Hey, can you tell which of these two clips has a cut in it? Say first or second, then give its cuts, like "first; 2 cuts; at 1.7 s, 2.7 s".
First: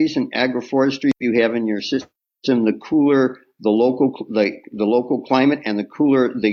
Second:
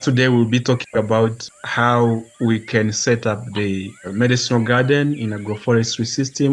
second; 3 cuts; at 1.5 s, 2.3 s, 4.1 s